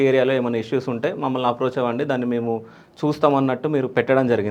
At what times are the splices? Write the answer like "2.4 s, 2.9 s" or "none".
none